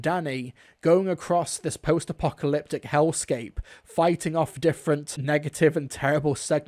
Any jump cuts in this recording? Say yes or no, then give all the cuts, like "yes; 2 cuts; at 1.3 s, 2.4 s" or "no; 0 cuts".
yes; 1 cut; at 5.1 s